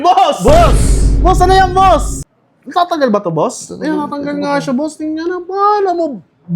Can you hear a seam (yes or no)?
yes